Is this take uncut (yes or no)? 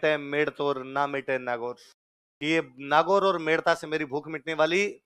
yes